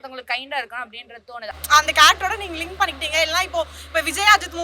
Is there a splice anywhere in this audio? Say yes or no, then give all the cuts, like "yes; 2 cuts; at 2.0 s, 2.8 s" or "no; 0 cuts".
yes; 1 cut; at 1.5 s